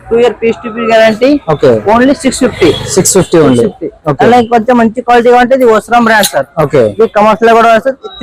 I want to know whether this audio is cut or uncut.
uncut